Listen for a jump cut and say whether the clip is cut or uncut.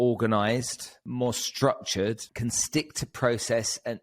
cut